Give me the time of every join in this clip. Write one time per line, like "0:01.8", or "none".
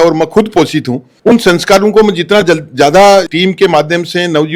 none